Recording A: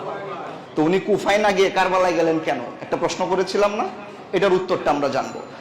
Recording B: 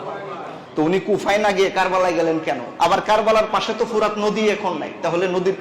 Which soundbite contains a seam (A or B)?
B